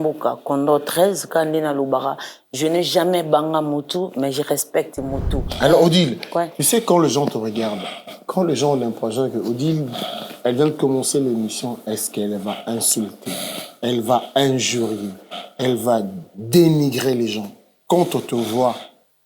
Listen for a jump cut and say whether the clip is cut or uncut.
cut